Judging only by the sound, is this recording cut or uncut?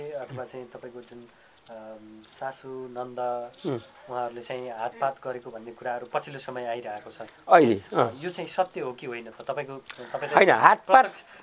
uncut